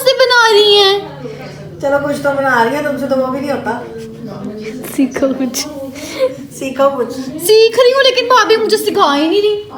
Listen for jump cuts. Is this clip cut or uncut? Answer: uncut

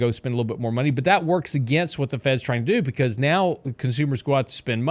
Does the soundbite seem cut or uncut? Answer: uncut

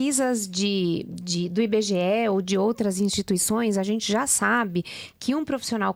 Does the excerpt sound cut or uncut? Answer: uncut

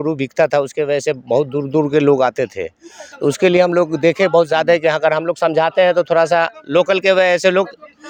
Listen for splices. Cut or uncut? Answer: uncut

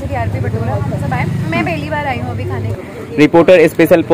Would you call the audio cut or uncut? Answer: cut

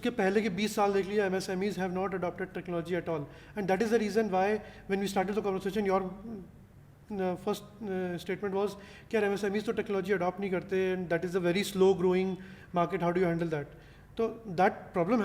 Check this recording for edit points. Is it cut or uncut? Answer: uncut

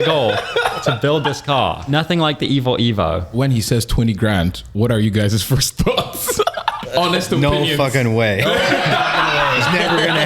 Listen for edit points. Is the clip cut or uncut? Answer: cut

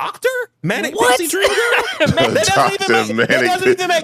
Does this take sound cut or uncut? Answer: cut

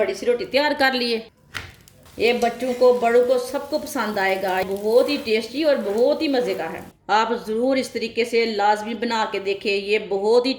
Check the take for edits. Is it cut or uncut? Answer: cut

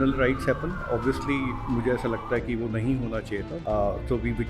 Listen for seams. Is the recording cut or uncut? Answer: cut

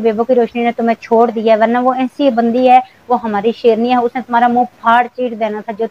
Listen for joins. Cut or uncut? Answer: uncut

